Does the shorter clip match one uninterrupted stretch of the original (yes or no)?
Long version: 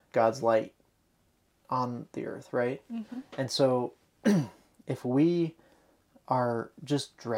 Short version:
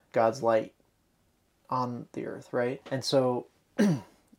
no